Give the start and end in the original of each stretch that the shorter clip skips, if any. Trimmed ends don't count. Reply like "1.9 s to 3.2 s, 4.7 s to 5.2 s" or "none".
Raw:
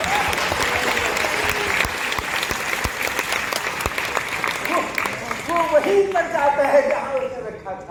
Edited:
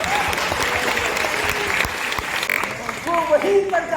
2.5 s to 4.9 s